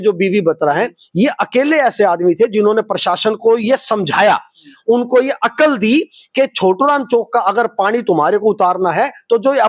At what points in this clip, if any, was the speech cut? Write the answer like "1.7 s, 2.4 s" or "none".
none